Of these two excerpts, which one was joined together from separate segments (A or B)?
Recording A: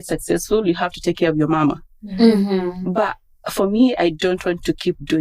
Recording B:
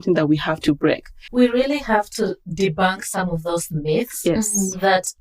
B